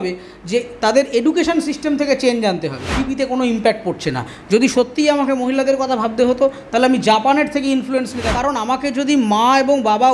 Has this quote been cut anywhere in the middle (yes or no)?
yes